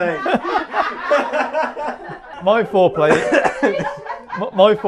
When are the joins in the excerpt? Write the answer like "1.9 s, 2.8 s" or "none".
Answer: 2.3 s